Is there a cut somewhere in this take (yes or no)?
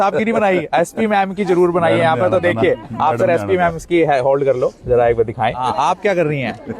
yes